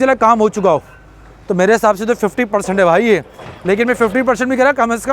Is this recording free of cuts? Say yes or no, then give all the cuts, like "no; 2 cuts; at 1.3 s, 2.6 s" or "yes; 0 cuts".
yes; 0 cuts